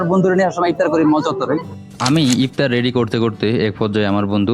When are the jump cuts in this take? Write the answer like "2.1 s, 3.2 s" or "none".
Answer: 1.7 s